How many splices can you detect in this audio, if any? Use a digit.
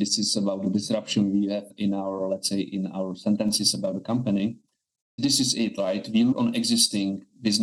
3